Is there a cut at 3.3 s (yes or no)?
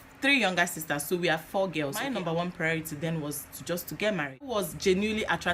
no